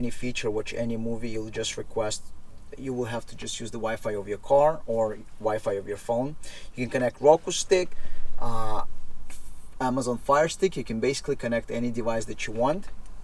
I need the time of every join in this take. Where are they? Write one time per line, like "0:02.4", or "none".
none

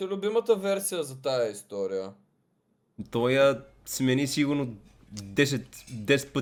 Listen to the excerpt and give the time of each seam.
none

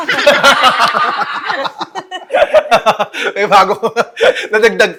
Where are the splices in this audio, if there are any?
none

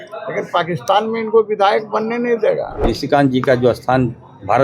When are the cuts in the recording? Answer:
0:02.8

